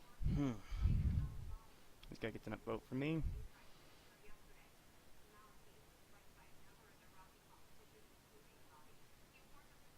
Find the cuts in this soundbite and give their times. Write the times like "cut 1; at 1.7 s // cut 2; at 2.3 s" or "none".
cut 1; at 3.2 s